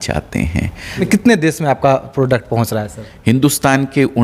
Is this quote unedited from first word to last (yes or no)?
no